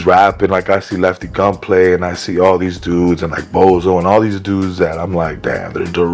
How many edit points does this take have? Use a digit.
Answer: 0